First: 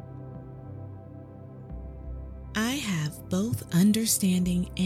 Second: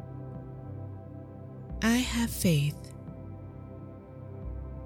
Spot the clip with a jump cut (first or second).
first